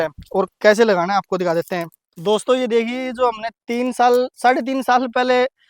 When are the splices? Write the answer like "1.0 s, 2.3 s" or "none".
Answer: 2.0 s